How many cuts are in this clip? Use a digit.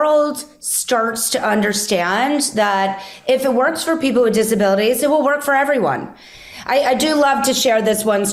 0